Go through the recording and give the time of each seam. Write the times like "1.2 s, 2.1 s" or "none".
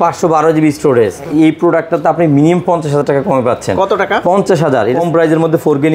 1.2 s, 5.0 s